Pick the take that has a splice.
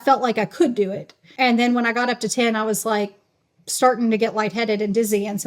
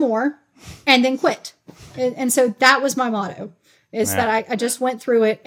first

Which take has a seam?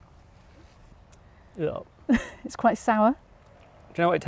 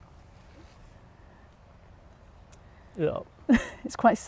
first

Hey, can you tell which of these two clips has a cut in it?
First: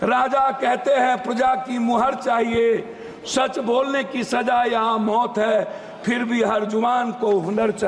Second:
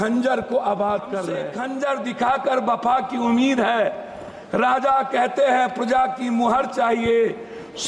second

